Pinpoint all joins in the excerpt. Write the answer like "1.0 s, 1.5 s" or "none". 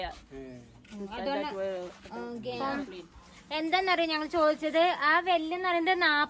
2.6 s